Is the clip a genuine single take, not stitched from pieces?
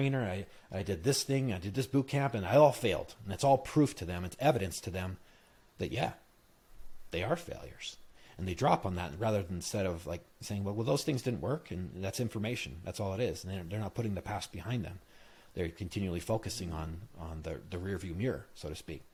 yes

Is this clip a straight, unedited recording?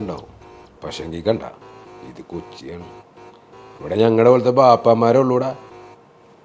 yes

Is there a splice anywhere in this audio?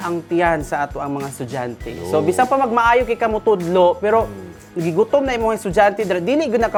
no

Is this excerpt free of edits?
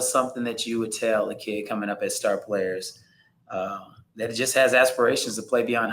yes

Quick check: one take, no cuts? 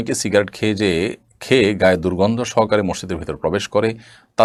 yes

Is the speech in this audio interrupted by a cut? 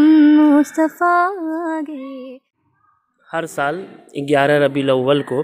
yes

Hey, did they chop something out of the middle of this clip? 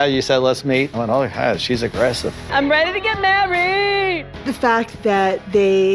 yes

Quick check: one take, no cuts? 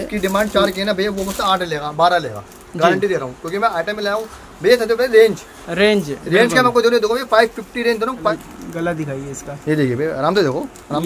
no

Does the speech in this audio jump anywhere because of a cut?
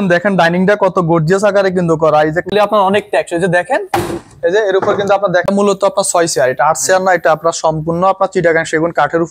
yes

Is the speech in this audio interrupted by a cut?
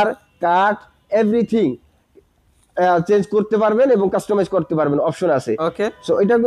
no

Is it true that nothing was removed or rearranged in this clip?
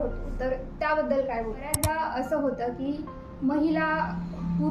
no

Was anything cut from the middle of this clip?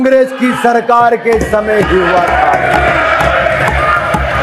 no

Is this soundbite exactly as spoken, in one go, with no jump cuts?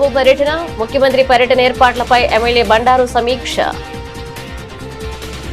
yes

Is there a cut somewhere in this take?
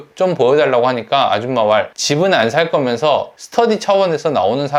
no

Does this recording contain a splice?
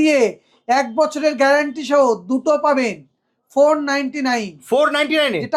no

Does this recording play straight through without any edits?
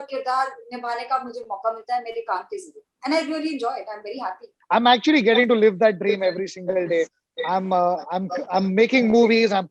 no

